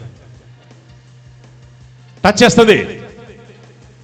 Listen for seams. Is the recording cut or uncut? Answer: uncut